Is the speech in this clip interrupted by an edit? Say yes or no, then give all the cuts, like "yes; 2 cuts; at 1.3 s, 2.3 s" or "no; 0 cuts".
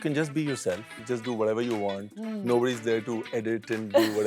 yes; 1 cut; at 0.9 s